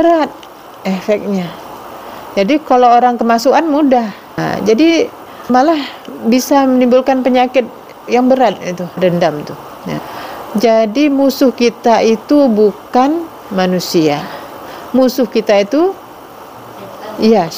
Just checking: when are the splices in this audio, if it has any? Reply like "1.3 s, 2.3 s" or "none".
4.4 s, 5.5 s, 9.0 s, 10.1 s